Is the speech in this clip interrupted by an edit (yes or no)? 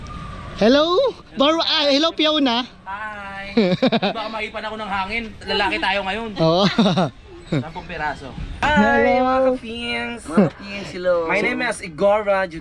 yes